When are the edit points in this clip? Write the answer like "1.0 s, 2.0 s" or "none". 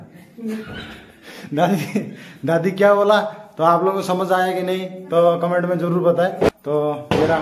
6.5 s